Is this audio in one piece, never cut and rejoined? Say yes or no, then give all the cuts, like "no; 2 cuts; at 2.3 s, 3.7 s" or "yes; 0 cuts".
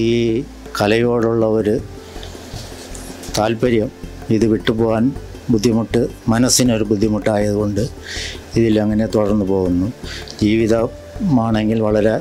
yes; 0 cuts